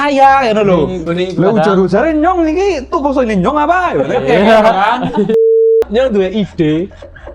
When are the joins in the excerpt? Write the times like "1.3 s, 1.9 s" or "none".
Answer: 1.0 s, 5.8 s